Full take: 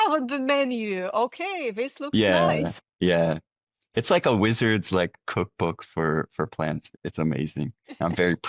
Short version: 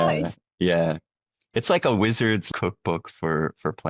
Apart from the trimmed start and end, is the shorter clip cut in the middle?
yes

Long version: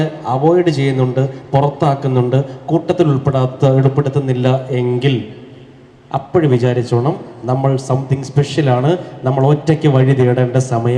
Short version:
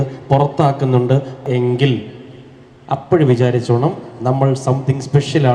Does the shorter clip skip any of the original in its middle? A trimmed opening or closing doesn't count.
yes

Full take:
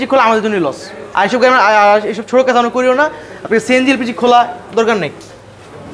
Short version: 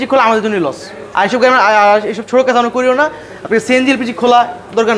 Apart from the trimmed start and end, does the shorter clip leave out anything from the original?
no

